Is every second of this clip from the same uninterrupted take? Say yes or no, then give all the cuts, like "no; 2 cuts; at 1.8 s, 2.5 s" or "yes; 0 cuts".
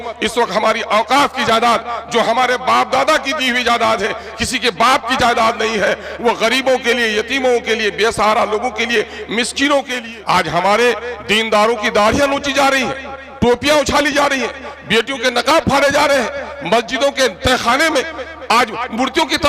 no; 1 cut; at 10.0 s